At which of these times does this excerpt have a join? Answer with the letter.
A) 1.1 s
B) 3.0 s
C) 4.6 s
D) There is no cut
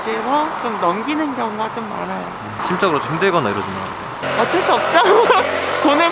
D